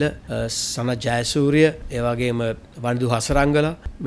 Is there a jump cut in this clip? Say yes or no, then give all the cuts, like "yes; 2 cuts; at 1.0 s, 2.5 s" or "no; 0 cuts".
no; 0 cuts